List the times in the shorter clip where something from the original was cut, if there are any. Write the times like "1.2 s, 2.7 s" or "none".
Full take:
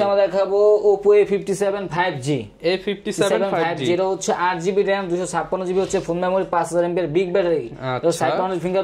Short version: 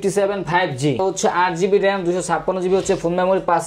1.0 s